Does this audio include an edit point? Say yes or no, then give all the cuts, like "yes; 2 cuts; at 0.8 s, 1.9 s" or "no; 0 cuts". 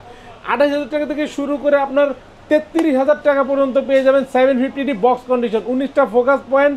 no; 0 cuts